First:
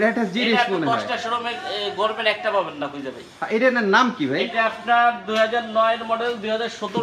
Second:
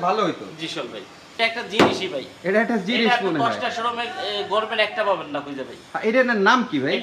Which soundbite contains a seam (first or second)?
second